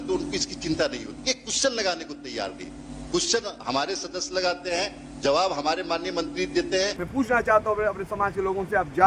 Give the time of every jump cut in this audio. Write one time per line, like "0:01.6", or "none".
0:07.0